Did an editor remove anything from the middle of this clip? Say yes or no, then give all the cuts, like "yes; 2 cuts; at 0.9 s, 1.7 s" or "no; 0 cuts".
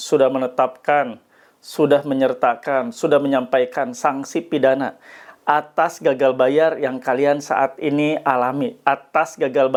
no; 0 cuts